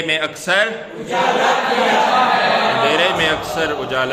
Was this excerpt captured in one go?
yes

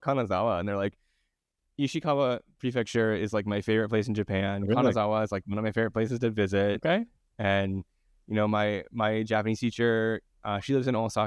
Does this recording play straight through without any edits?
yes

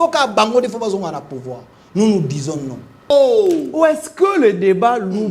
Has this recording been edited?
yes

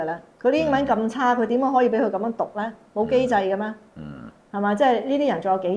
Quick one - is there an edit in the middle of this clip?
no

